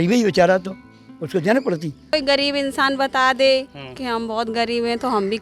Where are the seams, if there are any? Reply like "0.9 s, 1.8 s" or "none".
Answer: 2.1 s